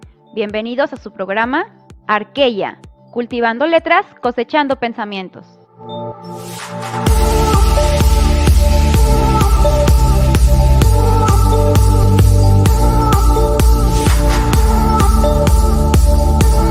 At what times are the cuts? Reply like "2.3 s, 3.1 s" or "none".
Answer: none